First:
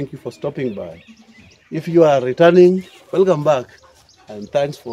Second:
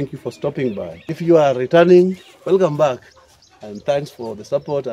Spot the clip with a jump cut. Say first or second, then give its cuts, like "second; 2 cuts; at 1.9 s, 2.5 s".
second; 1 cut; at 1.0 s